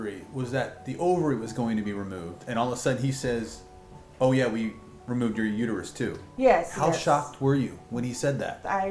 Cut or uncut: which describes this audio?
uncut